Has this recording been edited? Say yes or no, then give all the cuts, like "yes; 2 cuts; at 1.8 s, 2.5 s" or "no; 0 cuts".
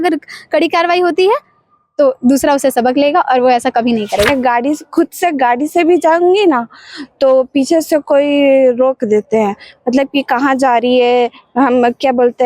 yes; 1 cut; at 4.3 s